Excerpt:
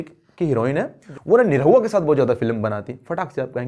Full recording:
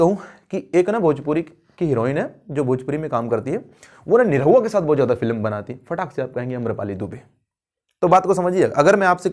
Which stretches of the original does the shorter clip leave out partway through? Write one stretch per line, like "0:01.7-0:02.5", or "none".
0:02.4-0:03.8